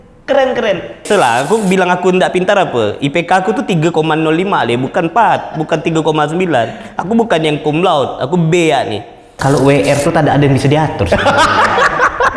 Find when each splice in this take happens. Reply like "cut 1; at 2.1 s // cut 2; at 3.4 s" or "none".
cut 1; at 1.1 s // cut 2; at 9.3 s